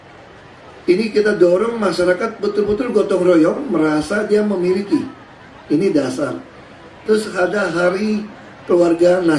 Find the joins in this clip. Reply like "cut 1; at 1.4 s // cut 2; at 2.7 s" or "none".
none